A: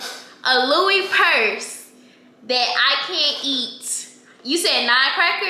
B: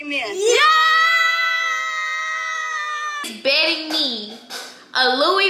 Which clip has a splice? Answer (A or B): B